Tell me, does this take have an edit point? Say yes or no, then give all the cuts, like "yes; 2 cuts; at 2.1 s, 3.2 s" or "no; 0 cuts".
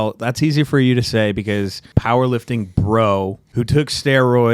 yes; 2 cuts; at 1.8 s, 3.4 s